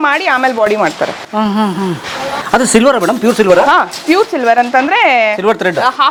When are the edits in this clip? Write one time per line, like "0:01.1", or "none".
none